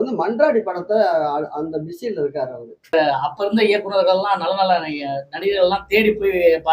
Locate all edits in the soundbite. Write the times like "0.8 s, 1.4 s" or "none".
2.9 s